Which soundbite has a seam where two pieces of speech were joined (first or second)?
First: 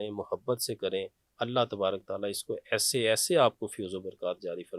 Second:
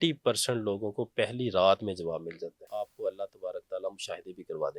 second